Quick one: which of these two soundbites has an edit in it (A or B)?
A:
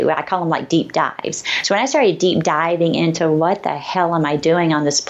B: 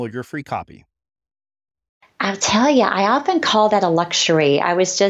B